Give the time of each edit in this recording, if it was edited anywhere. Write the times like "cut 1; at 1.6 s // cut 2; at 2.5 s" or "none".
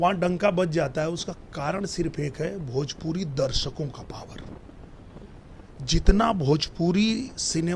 none